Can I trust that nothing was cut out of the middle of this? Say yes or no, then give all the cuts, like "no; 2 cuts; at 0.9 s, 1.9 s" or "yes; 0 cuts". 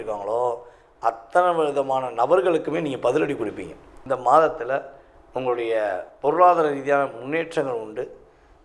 no; 1 cut; at 3.9 s